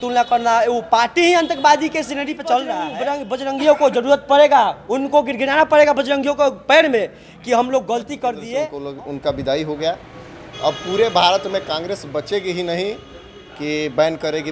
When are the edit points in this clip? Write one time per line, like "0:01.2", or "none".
0:02.9
0:08.8

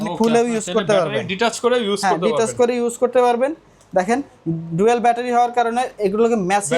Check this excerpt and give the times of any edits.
none

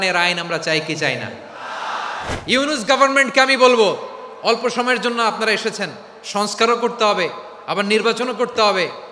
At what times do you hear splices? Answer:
0:02.3

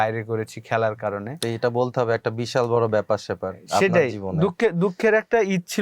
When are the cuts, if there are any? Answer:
none

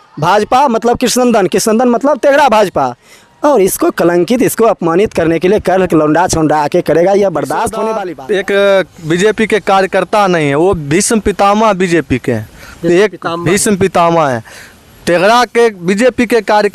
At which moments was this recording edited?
0:07.9

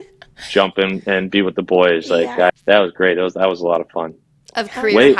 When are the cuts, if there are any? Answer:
0:02.5

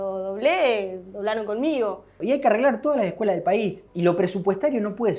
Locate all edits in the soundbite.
0:02.2
0:03.8

